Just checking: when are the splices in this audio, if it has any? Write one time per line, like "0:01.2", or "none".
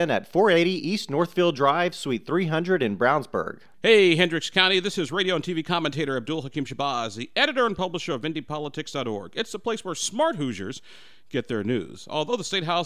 0:03.6

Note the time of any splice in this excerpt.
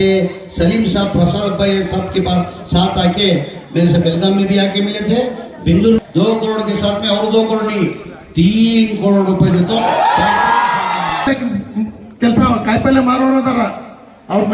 0:06.0
0:11.3

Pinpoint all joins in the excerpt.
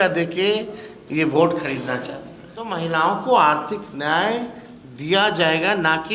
0:02.8

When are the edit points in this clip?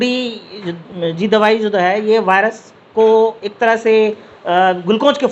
none

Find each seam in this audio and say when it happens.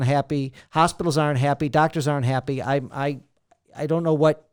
none

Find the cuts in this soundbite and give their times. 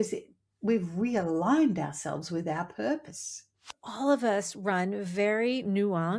0:03.8

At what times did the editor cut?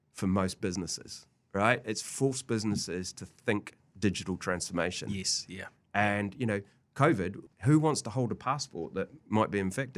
0:07.4

